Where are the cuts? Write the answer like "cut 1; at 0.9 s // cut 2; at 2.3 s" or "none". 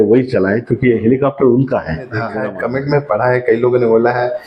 cut 1; at 2.3 s